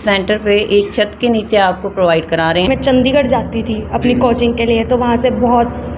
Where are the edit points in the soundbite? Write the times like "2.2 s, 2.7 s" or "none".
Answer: 2.7 s